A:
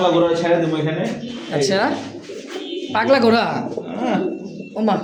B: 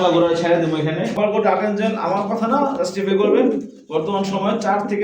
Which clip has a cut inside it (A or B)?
B